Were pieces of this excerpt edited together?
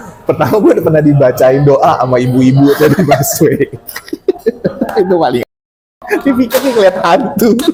no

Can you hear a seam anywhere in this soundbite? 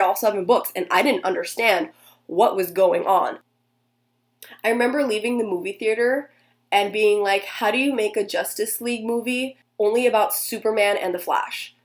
yes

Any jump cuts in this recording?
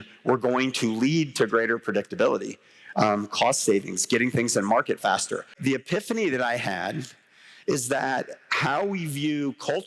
yes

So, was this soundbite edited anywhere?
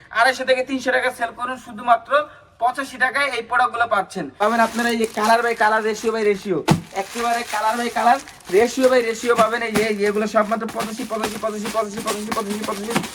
yes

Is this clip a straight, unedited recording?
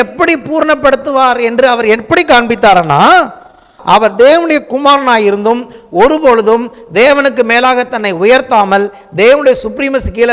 no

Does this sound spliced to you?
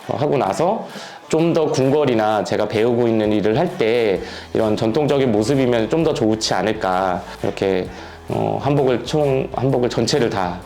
yes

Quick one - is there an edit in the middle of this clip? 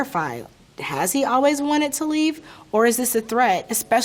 no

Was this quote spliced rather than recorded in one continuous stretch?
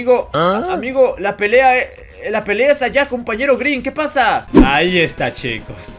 yes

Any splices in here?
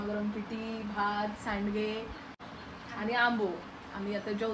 yes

